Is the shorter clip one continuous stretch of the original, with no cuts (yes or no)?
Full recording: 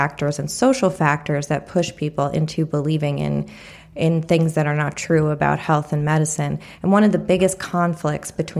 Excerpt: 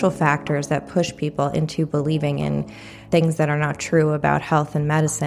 no